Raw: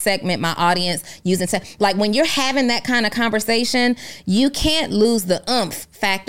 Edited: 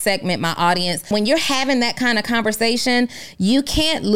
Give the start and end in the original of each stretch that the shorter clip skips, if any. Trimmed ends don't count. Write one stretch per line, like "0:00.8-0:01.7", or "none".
0:01.1-0:02.0